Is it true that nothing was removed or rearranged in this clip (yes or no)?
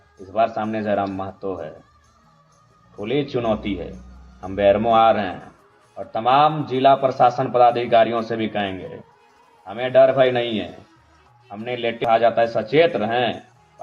no